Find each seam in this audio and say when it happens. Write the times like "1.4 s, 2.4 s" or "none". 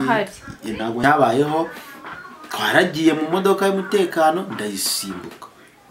1.0 s